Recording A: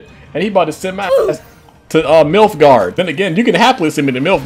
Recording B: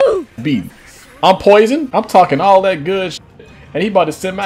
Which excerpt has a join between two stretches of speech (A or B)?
B